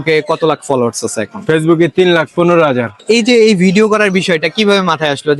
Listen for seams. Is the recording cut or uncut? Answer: cut